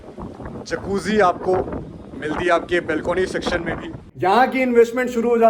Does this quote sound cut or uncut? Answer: cut